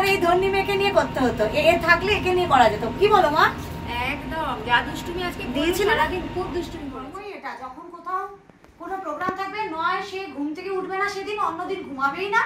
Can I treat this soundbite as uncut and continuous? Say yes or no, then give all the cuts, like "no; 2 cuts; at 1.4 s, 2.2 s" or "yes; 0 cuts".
no; 1 cut; at 6.9 s